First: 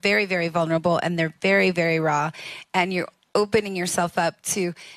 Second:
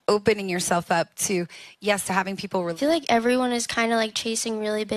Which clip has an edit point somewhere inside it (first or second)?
second